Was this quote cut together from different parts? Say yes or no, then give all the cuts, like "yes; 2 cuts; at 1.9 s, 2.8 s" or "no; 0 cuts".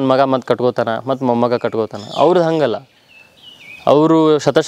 no; 0 cuts